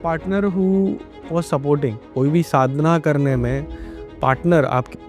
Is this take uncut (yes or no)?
no